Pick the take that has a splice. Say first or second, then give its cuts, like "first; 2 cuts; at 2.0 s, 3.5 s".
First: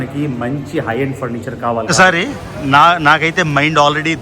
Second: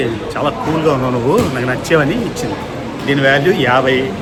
first; 1 cut; at 1.9 s